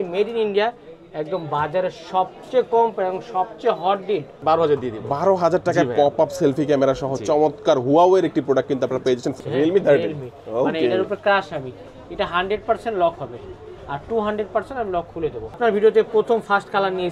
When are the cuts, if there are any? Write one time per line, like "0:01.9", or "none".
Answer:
0:04.4
0:09.3
0:15.6